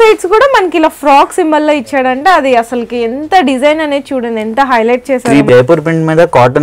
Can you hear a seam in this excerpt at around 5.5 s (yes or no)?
yes